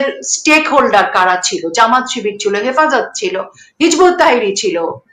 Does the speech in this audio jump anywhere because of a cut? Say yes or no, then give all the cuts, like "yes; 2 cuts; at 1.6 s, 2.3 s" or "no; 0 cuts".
no; 0 cuts